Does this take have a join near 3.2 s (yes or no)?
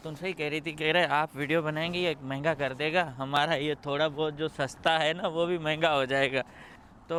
no